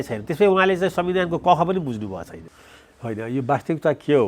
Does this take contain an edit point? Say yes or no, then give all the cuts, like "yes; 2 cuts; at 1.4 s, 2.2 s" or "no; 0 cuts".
yes; 1 cut; at 2.4 s